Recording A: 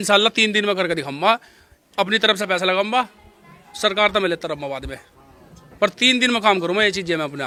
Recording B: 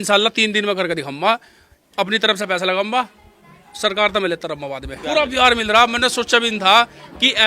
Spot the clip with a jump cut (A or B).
B